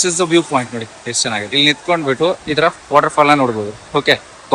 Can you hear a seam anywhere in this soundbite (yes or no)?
no